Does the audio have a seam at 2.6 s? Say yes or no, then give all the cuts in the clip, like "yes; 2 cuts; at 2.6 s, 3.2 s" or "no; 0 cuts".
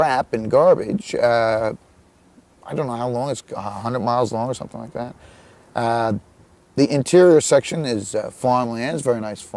no; 1 cut; at 8.4 s